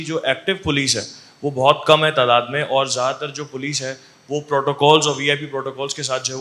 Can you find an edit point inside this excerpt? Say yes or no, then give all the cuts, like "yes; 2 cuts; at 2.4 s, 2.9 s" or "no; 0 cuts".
no; 0 cuts